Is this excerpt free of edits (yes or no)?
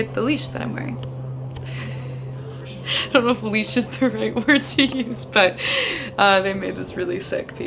yes